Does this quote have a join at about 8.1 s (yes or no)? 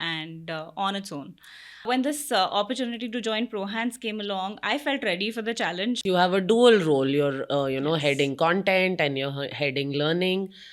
no